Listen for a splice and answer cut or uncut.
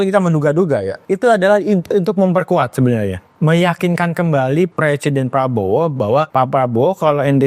cut